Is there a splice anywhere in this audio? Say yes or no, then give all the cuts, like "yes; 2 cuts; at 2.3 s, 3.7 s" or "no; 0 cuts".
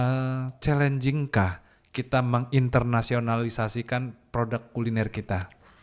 no; 0 cuts